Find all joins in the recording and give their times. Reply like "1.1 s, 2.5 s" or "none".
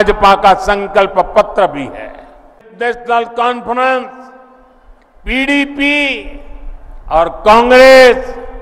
2.7 s